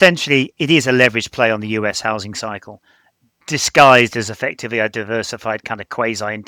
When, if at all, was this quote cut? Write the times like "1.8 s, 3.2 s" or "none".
none